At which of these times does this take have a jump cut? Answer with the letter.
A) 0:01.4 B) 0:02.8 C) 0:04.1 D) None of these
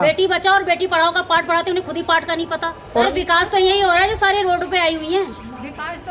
B